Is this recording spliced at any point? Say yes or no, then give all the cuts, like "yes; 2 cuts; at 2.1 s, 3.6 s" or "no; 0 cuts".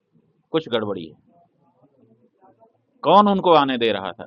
no; 0 cuts